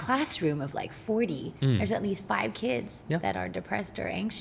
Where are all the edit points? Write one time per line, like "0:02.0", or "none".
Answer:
none